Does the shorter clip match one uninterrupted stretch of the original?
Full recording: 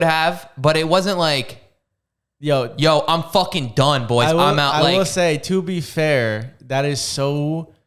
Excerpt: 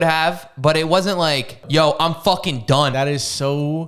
no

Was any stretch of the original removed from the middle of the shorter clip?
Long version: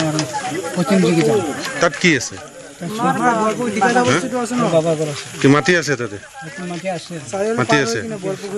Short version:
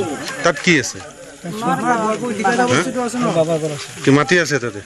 no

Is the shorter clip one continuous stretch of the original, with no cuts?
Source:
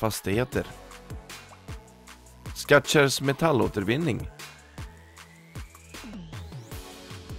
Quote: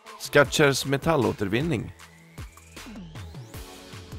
no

